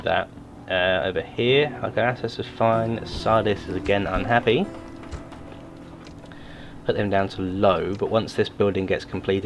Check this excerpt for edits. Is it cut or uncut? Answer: uncut